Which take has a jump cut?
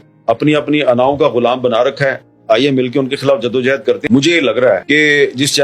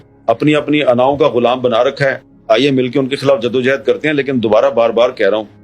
first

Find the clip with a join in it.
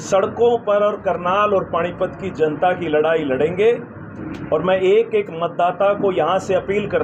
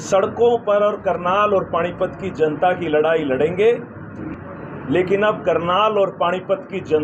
second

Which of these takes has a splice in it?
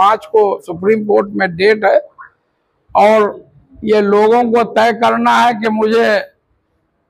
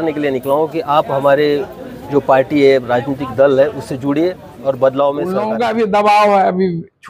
second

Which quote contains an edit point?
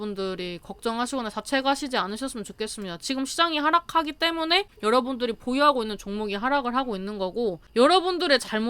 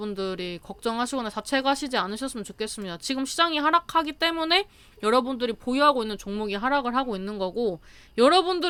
first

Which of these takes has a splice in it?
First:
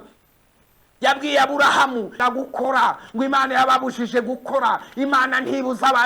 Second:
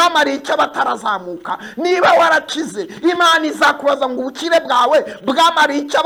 first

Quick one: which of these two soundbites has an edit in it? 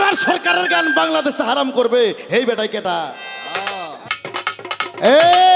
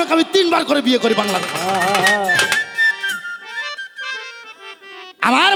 first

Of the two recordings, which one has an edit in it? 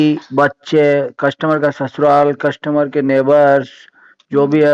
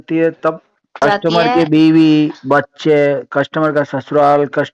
second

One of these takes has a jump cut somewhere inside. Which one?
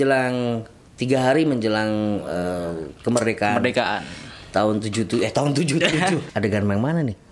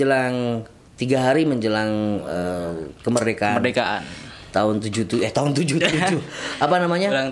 first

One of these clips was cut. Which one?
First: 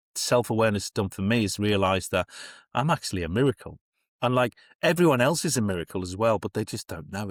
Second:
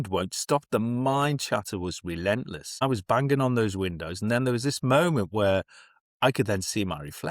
second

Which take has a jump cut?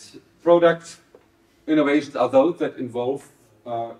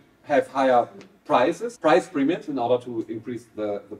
second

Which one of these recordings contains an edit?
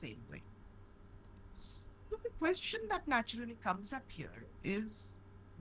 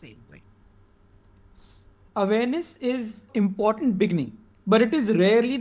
second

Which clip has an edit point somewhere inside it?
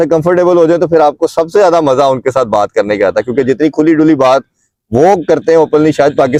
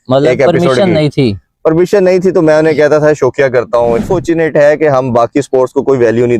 second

